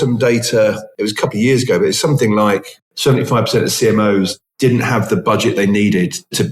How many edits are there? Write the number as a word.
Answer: two